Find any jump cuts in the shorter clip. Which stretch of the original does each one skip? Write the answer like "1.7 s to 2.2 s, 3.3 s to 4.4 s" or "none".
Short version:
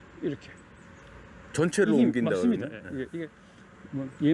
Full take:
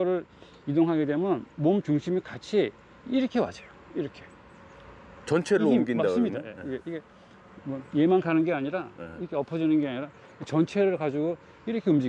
none